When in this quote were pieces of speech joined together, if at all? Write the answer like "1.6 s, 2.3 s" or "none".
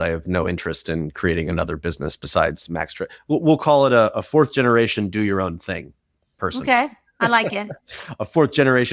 none